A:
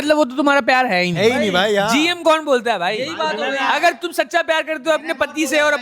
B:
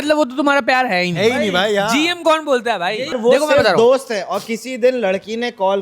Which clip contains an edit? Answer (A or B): B